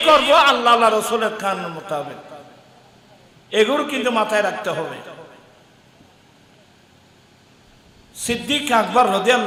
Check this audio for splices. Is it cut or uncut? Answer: uncut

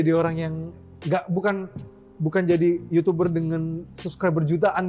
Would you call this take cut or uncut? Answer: uncut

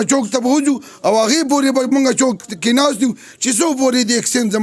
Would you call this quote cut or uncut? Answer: uncut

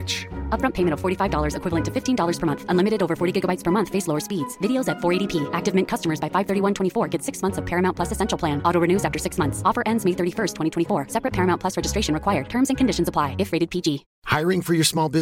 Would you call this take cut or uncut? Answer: cut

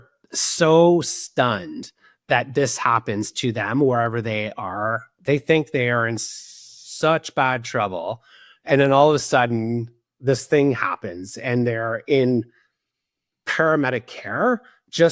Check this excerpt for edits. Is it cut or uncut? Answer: uncut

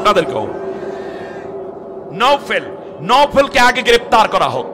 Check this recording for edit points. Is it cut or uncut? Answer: cut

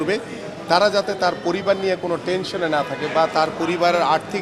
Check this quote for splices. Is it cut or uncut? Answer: uncut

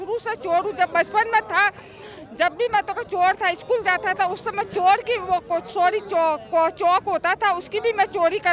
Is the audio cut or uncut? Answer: uncut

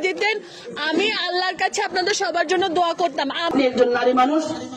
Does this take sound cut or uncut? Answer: cut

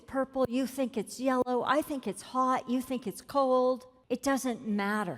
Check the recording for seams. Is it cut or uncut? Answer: cut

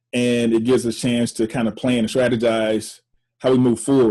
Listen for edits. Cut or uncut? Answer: uncut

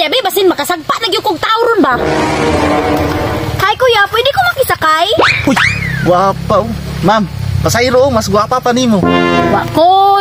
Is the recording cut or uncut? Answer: uncut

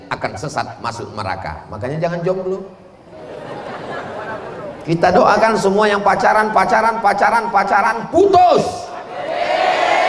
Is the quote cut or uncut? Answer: uncut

